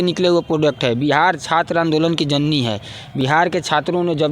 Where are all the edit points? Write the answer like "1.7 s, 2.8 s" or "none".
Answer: none